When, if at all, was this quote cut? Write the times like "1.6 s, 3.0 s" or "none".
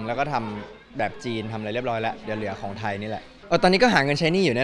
3.3 s